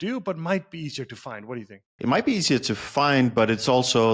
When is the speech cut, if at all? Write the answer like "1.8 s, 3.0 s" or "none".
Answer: none